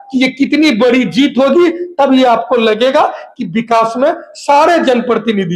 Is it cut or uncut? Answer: uncut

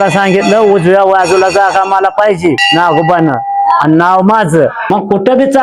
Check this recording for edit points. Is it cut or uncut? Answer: cut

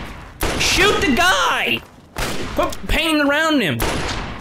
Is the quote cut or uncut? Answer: uncut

